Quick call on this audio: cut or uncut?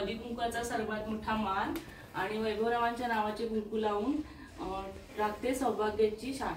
uncut